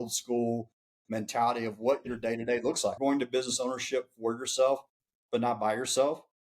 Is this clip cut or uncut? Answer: cut